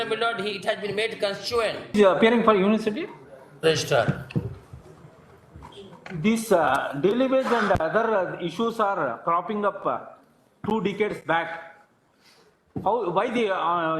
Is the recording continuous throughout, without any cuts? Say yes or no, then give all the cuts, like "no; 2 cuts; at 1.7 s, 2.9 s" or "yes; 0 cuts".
no; 1 cut; at 1.9 s